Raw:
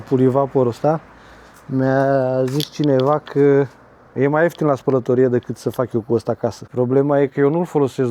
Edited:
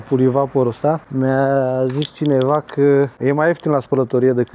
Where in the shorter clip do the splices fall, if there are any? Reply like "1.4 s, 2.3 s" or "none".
1.1 s, 3.1 s